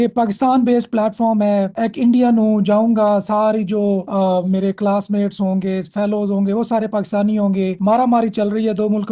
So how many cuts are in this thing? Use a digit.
0